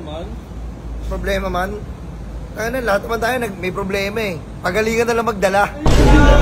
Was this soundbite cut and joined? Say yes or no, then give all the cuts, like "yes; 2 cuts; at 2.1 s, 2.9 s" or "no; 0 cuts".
no; 0 cuts